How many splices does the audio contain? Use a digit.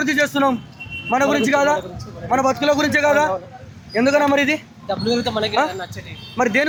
0